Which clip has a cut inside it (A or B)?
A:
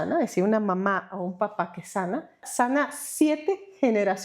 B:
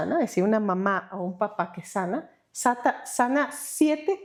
A